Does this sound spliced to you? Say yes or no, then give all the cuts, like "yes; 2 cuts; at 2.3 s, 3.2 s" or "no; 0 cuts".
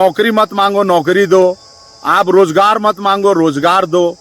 no; 0 cuts